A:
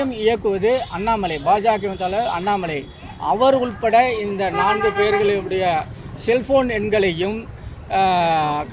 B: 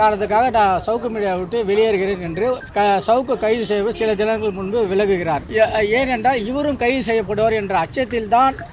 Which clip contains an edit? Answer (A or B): B